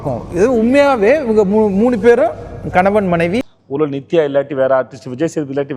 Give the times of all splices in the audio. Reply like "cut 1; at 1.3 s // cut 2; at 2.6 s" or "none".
cut 1; at 3.5 s